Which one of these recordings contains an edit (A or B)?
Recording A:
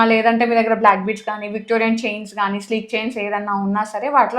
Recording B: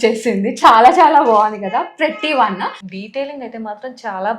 B